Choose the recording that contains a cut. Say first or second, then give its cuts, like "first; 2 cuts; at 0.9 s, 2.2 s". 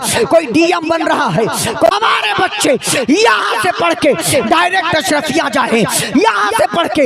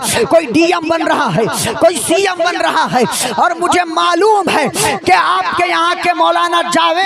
first; 1 cut; at 1.9 s